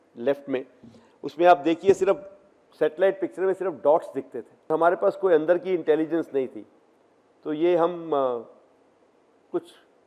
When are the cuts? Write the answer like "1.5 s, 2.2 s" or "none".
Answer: 4.7 s

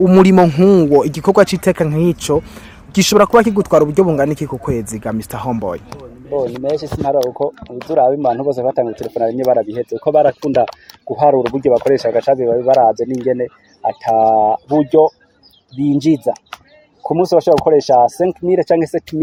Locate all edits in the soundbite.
none

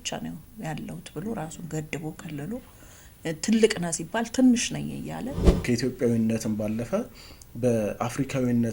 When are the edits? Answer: 5.6 s

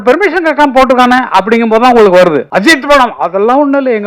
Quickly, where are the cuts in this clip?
2.5 s

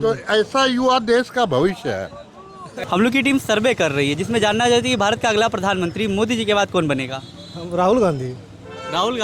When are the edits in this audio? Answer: 2.7 s

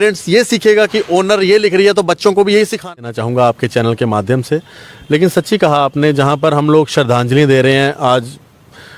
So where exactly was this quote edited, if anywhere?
3.0 s

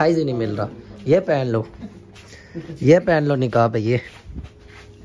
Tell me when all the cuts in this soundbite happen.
1.2 s

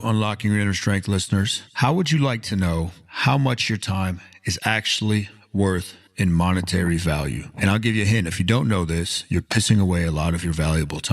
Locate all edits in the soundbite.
6.0 s

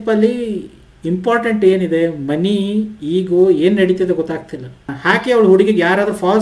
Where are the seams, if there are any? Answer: 4.9 s

